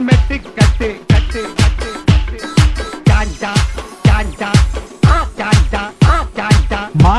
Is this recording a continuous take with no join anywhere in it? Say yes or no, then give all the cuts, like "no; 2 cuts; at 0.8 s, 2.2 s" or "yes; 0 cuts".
yes; 0 cuts